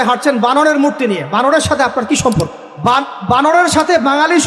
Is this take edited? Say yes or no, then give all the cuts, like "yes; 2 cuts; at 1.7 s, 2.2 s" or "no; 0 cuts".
yes; 1 cut; at 2.7 s